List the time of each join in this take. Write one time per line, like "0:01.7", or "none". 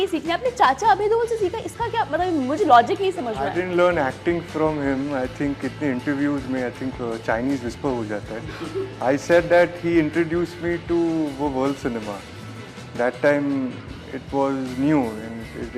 none